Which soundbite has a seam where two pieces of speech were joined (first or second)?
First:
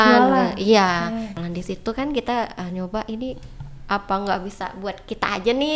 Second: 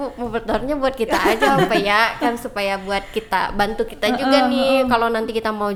first